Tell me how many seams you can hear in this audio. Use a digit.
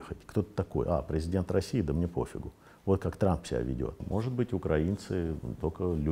1